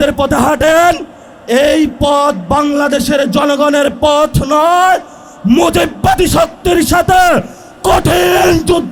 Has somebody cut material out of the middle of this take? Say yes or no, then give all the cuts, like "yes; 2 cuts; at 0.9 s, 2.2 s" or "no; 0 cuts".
no; 0 cuts